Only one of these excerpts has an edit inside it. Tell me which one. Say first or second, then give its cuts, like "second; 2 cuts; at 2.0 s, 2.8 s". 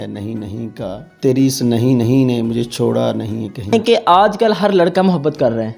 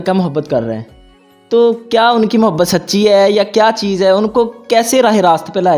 first; 1 cut; at 3.8 s